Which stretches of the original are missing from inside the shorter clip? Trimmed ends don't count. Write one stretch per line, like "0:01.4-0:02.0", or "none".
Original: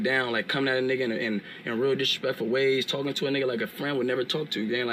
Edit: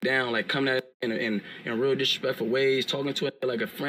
none